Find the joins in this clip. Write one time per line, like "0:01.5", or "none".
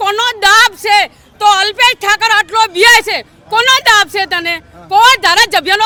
none